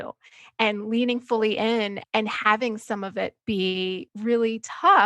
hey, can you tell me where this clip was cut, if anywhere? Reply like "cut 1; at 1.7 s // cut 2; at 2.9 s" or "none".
cut 1; at 2.0 s // cut 2; at 4.1 s